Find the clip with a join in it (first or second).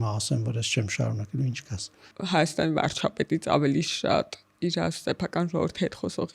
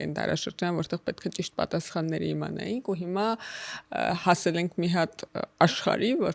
first